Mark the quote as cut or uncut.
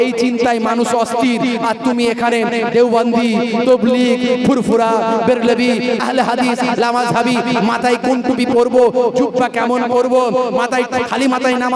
uncut